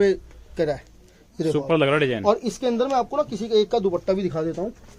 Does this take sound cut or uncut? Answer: uncut